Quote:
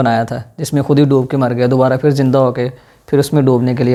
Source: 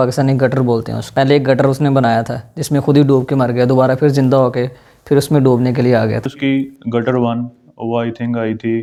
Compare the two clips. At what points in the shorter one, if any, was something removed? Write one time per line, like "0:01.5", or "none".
none